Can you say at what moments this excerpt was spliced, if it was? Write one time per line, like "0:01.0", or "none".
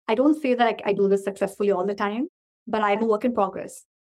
0:03.0